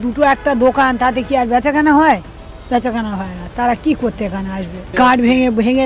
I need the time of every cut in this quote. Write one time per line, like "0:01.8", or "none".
none

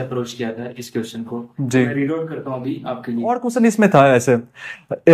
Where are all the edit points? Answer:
0:03.4

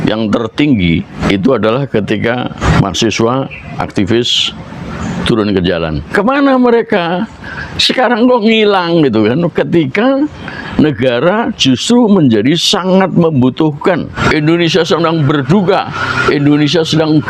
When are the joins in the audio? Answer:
0:01.1
0:02.6
0:06.0
0:14.1

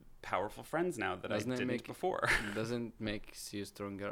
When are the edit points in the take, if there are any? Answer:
none

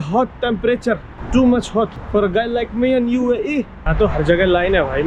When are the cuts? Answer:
0:01.1
0:02.0
0:03.9

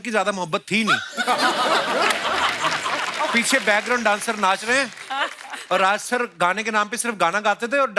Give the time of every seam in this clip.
none

